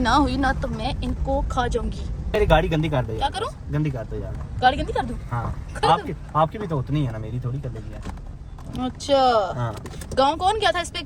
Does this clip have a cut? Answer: no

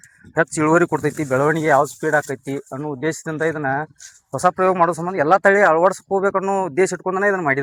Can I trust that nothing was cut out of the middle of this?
yes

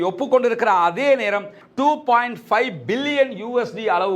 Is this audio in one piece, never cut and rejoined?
no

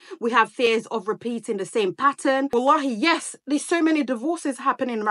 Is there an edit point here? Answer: yes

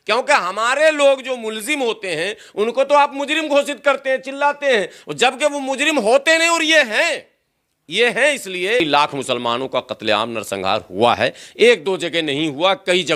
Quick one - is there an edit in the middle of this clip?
yes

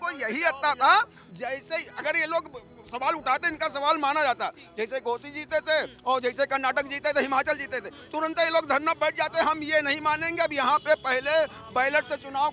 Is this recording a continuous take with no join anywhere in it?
yes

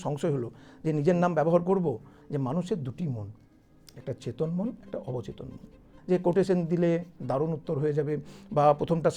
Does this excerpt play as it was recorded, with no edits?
no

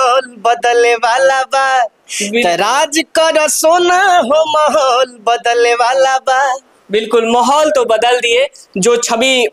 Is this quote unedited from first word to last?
yes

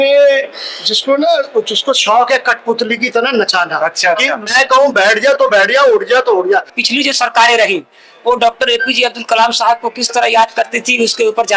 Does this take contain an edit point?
yes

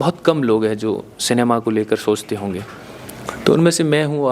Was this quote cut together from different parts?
no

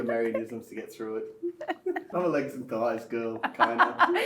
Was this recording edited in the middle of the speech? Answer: yes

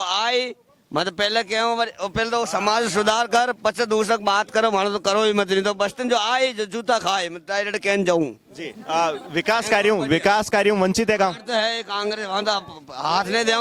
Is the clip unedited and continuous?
yes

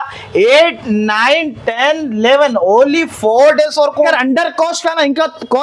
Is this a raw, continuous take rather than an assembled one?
no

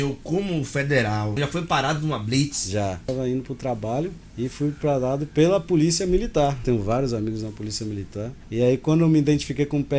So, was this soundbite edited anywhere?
yes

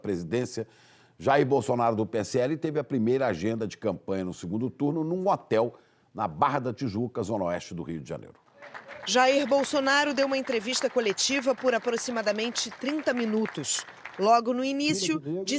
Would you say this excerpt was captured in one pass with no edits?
no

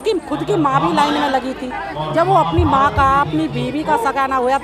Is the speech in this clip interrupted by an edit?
no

